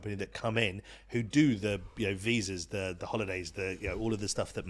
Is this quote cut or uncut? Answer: uncut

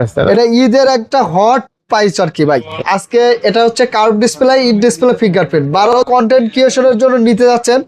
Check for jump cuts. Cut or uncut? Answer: cut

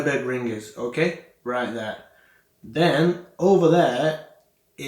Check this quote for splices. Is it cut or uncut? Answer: uncut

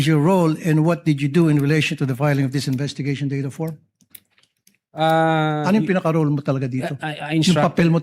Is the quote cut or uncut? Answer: uncut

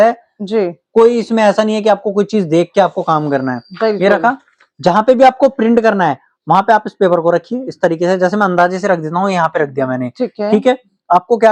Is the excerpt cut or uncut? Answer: uncut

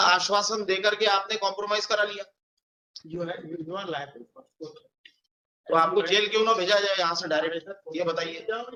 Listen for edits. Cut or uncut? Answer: uncut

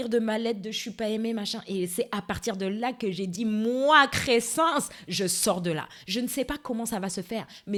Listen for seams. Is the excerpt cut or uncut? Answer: uncut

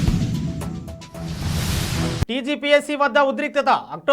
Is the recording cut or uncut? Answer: uncut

